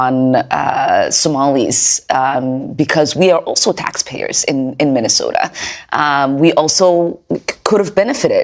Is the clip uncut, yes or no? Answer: yes